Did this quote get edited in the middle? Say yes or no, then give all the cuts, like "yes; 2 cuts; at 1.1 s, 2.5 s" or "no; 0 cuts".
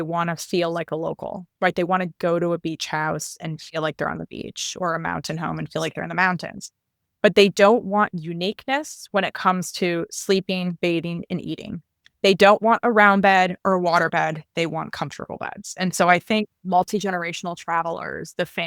yes; 1 cut; at 16.6 s